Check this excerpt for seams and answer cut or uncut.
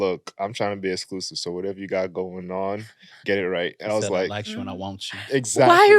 uncut